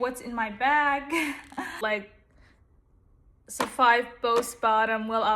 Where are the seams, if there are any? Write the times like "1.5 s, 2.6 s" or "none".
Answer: 1.8 s